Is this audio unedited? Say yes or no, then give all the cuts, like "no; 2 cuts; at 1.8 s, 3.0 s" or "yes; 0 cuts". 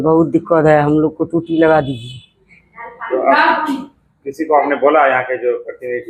yes; 0 cuts